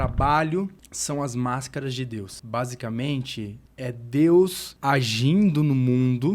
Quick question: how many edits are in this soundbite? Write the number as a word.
four